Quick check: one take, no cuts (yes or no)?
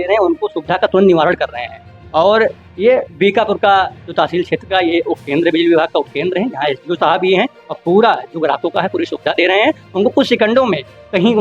yes